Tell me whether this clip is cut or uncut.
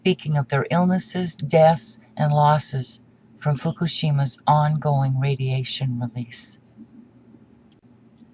cut